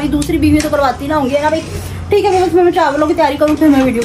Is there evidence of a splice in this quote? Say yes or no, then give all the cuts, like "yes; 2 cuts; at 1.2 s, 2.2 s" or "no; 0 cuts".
no; 0 cuts